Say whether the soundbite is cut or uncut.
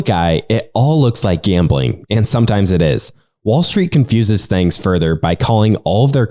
uncut